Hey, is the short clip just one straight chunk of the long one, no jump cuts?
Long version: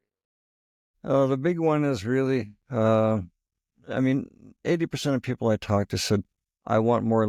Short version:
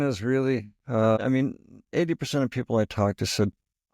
no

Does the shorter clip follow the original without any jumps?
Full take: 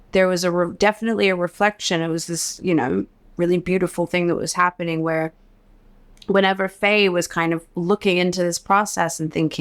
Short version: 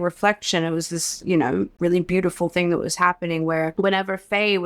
no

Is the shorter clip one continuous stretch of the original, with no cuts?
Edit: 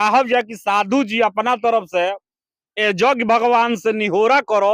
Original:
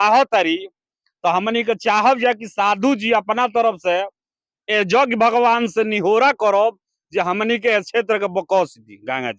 yes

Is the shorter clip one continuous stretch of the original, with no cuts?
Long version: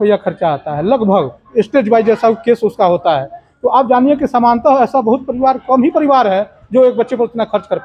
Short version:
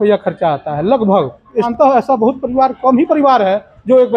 no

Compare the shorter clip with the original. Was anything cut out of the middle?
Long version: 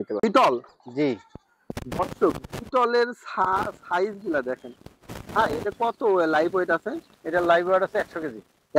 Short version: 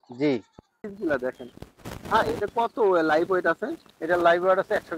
yes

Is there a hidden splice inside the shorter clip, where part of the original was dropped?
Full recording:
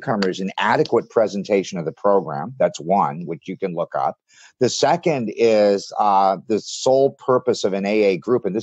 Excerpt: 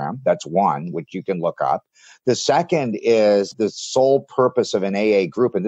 yes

